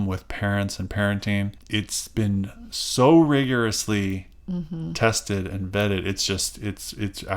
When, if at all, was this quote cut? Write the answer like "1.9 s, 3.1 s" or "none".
1.6 s